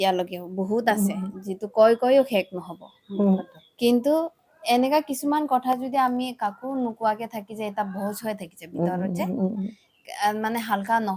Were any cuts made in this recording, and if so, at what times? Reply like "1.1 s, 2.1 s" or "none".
none